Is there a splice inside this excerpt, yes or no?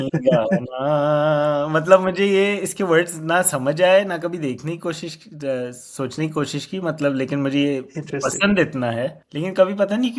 yes